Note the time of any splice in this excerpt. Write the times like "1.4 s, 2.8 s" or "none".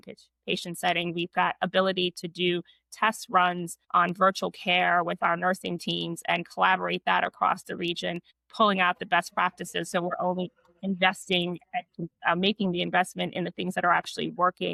none